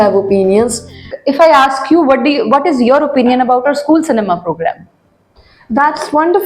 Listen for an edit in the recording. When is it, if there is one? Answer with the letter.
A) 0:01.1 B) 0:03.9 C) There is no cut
A